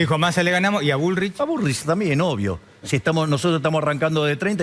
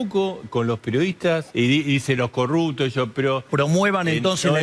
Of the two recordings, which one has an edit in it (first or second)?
second